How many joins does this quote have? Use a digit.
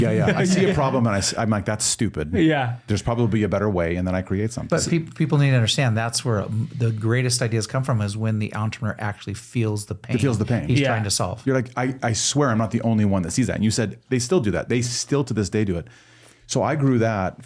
0